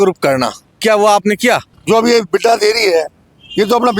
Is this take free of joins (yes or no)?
no